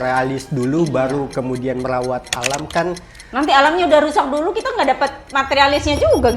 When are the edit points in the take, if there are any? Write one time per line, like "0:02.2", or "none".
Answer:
0:01.3